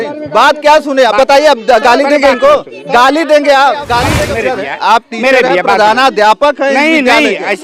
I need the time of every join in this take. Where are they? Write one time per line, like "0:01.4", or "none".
0:04.1